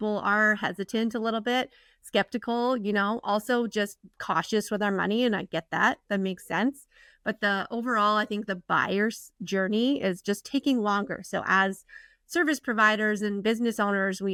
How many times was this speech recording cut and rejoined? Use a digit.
0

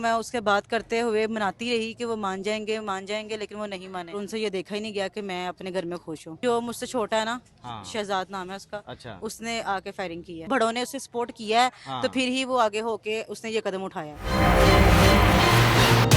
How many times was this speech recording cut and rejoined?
4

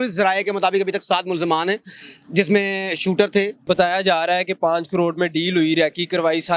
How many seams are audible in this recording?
1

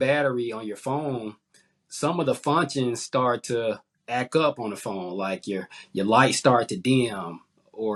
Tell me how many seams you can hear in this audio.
0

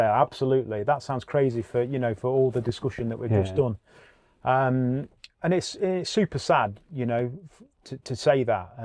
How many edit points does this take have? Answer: 0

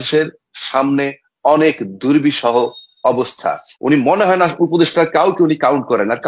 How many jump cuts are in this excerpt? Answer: 1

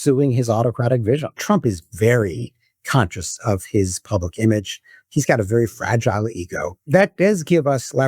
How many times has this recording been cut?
2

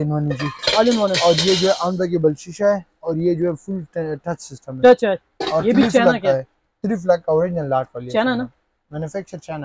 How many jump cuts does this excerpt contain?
0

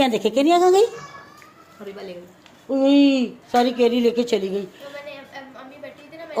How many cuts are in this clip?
0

